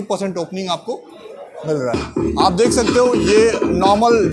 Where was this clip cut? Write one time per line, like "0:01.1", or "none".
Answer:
0:01.9

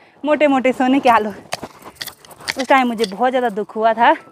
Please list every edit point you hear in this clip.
none

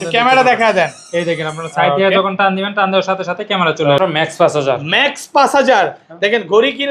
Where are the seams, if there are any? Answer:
0:04.0

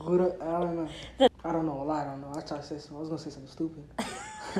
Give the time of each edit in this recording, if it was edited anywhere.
0:01.3

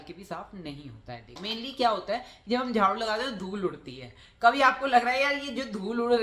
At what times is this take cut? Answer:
0:01.4

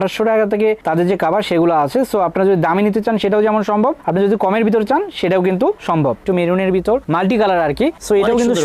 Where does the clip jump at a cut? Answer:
0:06.2

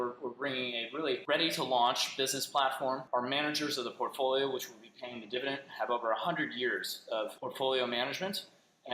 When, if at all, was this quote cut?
0:01.2
0:03.0
0:07.4

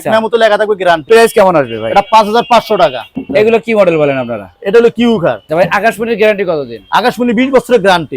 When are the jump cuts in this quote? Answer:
0:01.1
0:03.1
0:05.4

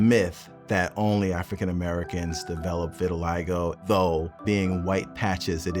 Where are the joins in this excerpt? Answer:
0:03.8
0:04.3

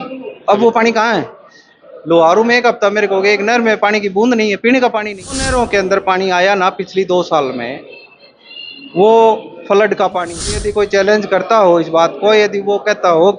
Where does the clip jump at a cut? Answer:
0:05.5
0:10.6

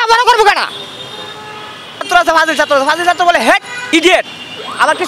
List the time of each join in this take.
0:02.1
0:03.8

